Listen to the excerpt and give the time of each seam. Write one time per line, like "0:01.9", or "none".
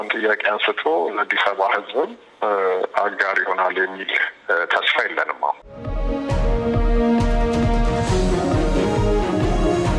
0:05.9